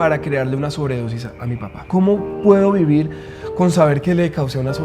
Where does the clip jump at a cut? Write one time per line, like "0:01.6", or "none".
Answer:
0:01.8

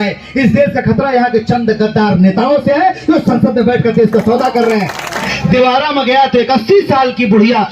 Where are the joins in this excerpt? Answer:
0:05.3

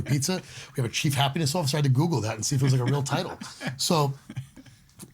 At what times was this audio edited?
none

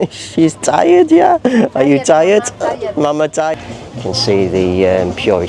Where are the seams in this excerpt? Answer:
0:03.5

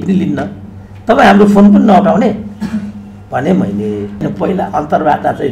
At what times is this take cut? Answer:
0:04.2

